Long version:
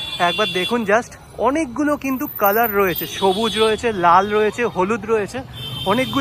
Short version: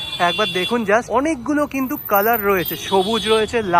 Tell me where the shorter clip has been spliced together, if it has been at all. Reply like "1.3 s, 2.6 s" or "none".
1.1 s